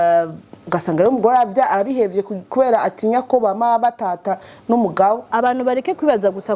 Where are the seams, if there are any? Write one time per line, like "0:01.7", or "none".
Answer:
0:05.3